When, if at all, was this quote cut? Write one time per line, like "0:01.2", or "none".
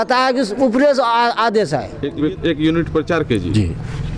0:02.0